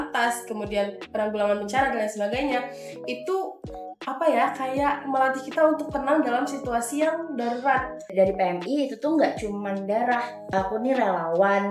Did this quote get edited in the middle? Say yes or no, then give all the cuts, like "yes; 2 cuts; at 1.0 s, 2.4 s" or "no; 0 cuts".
yes; 2 cuts; at 8.0 s, 10.5 s